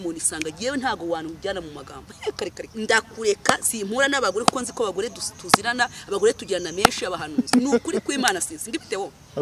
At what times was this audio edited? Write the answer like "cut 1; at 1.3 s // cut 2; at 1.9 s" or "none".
cut 1; at 2.6 s